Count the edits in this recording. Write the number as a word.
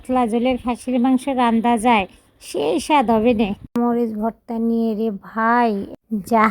one